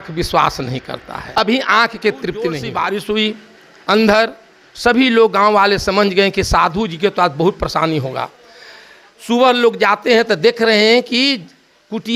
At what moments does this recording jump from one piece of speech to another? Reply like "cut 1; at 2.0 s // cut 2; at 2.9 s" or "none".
cut 1; at 2.6 s